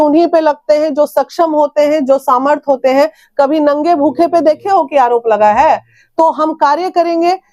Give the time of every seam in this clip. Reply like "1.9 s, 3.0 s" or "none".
none